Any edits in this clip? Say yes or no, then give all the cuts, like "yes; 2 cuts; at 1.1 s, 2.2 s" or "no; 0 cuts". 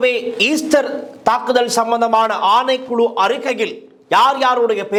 no; 0 cuts